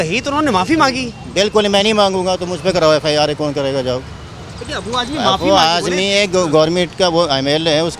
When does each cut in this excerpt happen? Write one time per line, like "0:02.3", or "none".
none